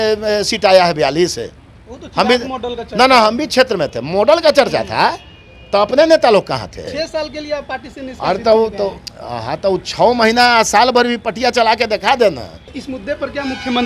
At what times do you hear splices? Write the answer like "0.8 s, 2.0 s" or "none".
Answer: 6.9 s, 12.8 s